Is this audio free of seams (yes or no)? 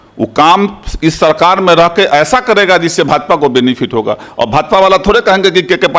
yes